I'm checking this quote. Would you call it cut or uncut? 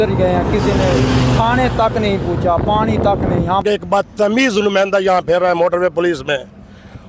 cut